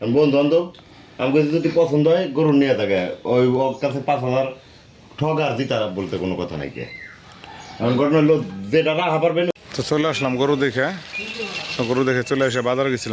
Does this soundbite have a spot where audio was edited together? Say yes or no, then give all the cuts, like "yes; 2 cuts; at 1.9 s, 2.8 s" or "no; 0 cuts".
no; 0 cuts